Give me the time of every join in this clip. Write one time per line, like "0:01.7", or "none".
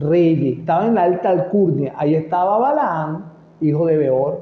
none